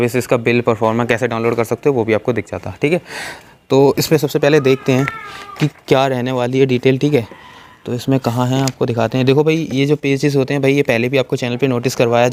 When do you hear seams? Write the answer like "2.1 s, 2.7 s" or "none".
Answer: none